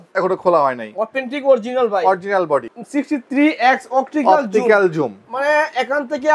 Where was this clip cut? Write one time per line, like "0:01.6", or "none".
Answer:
0:02.8